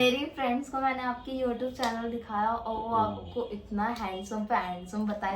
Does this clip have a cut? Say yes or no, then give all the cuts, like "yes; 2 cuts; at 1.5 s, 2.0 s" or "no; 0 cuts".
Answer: no; 0 cuts